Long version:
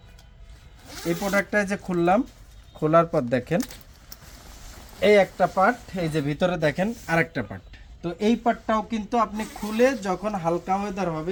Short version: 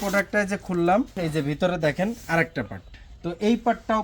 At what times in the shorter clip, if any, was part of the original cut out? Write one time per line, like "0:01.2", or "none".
0:01.2